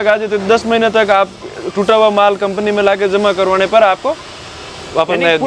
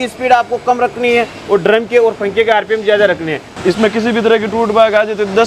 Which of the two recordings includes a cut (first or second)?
second